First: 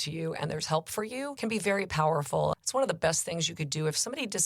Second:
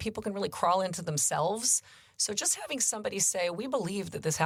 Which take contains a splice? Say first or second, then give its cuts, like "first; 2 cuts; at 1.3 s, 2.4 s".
first; 2 cuts; at 1.3 s, 2.5 s